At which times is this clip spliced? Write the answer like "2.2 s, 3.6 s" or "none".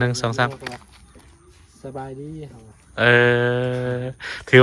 none